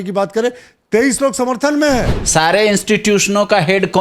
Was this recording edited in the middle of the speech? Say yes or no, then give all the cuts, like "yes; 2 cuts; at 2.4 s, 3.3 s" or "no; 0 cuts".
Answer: yes; 1 cut; at 2.2 s